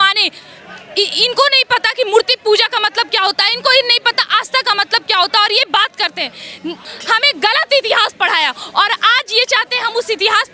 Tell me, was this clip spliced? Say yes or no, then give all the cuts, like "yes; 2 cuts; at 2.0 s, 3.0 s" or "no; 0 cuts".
yes; 1 cut; at 6.9 s